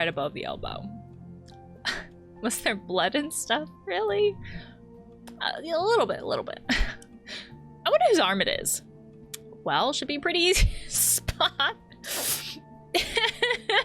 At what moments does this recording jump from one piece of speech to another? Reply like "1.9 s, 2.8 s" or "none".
12.0 s